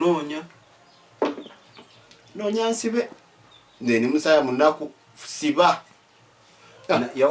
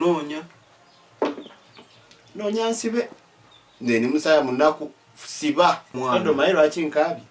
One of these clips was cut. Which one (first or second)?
second